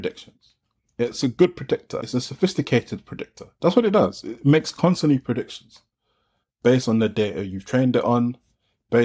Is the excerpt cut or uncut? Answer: uncut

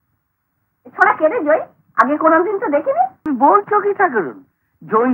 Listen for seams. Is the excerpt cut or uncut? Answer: cut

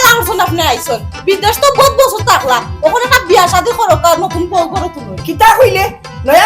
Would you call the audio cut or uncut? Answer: uncut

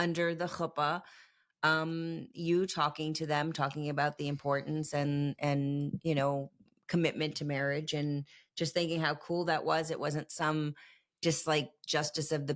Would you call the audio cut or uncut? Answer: uncut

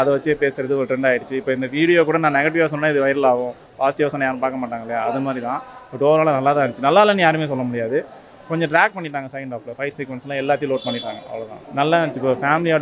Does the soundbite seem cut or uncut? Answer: uncut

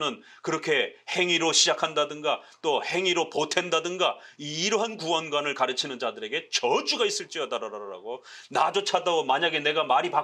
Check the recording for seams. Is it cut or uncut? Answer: uncut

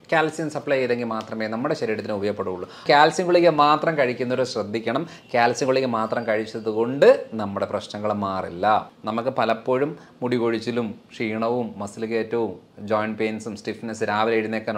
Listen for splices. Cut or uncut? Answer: cut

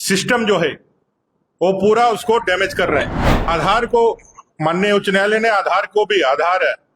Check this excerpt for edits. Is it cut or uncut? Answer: cut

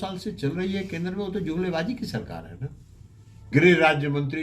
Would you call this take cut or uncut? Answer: cut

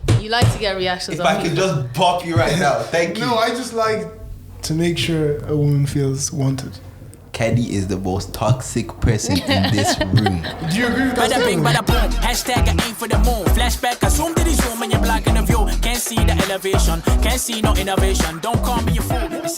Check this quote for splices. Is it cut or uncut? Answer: cut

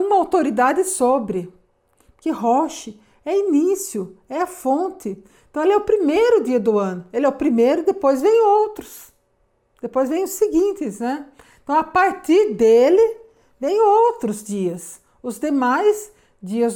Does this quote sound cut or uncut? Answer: uncut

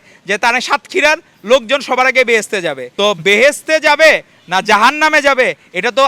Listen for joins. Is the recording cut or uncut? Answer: cut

